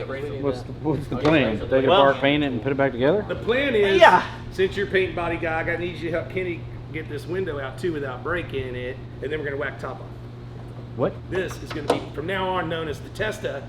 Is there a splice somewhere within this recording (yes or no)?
yes